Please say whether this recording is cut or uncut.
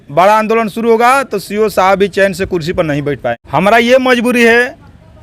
cut